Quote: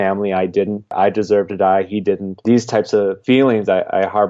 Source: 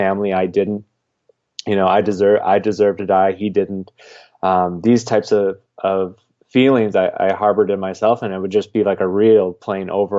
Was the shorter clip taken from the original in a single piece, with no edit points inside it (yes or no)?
no